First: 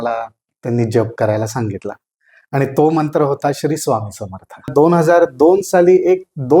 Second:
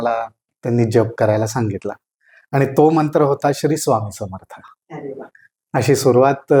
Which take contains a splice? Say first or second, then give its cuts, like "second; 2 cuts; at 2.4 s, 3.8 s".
first; 1 cut; at 4.7 s